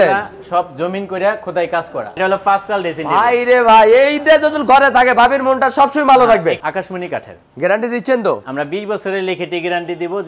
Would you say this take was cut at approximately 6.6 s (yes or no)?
yes